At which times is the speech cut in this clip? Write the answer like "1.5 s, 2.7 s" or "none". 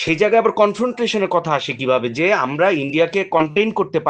none